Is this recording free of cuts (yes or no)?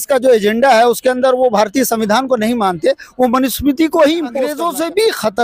no